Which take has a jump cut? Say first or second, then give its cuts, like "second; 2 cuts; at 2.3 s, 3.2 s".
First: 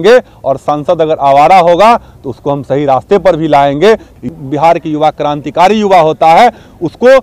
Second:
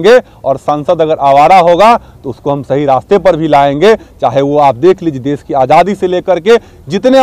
first; 1 cut; at 4.1 s